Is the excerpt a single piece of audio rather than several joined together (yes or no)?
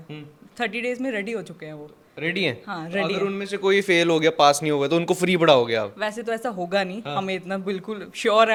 yes